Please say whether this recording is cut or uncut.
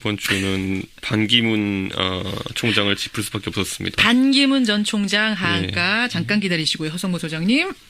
uncut